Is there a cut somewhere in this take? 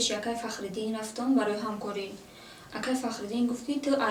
no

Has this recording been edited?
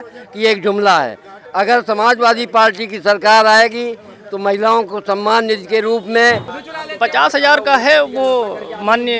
yes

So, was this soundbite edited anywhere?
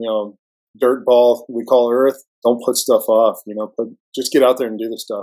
yes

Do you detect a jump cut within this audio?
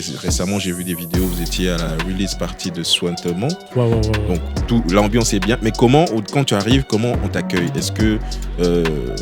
no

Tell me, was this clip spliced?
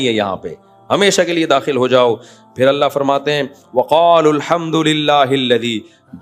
no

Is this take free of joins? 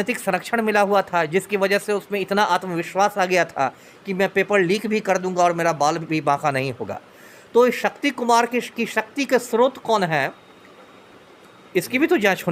yes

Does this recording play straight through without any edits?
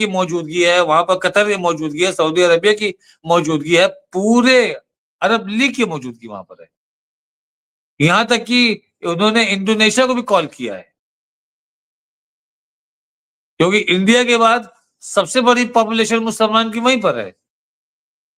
yes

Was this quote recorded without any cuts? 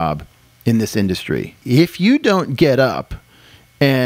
no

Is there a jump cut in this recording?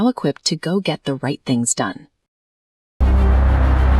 yes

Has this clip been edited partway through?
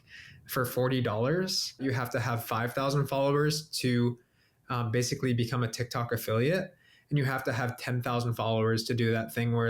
yes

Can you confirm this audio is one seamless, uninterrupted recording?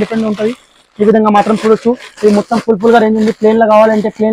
yes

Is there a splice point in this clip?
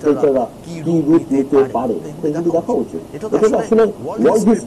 no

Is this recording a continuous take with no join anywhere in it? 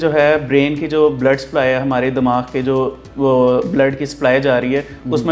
yes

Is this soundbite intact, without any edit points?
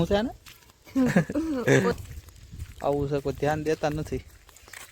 no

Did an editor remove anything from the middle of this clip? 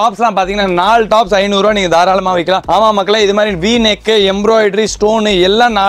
no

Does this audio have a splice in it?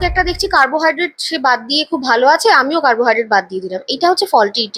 no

